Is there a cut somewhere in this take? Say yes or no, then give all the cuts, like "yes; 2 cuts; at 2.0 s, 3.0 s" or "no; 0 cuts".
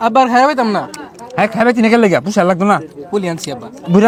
no; 0 cuts